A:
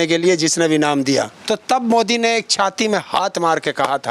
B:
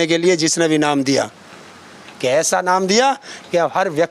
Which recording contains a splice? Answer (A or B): A